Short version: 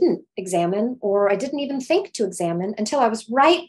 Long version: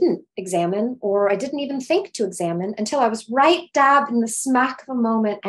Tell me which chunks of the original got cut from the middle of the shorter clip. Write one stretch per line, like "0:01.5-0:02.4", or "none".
none